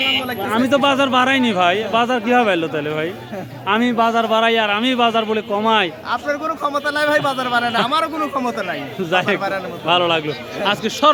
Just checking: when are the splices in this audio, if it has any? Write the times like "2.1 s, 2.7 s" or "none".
none